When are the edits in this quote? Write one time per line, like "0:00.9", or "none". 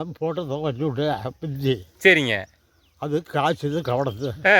none